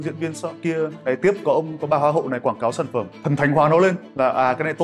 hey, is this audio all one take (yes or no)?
yes